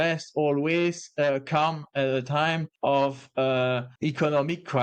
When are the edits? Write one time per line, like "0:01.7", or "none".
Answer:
0:02.7
0:03.9